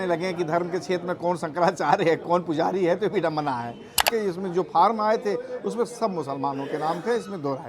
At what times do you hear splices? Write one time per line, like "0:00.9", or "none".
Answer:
0:04.0